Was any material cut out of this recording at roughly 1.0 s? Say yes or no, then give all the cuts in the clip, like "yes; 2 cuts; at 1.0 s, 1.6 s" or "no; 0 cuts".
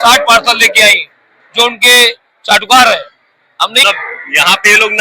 no; 1 cut; at 3.8 s